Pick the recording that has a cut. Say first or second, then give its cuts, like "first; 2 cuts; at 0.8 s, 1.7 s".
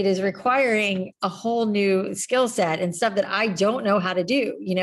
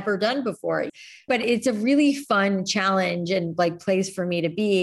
second; 1 cut; at 0.9 s